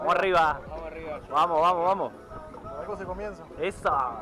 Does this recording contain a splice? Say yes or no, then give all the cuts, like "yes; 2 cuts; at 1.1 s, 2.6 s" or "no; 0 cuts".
no; 0 cuts